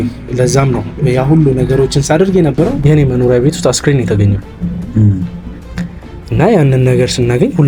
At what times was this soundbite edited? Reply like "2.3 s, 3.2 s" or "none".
2.8 s